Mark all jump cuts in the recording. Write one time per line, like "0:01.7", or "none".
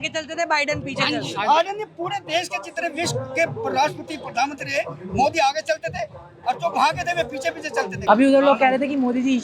0:08.0